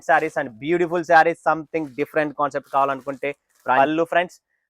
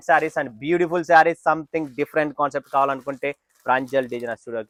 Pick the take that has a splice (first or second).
first